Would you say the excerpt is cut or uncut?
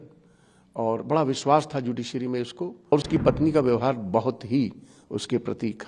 cut